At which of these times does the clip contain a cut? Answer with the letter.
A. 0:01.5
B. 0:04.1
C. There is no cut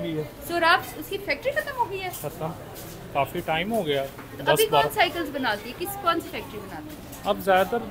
C